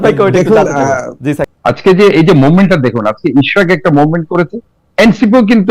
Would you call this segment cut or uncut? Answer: cut